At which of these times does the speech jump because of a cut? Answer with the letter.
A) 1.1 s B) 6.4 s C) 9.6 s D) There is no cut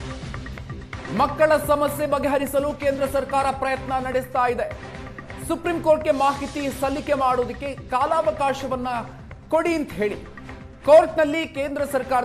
A